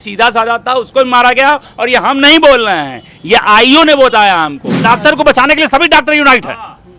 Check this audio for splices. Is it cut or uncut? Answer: cut